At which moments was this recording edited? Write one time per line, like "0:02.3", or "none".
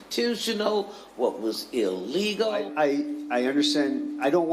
0:02.6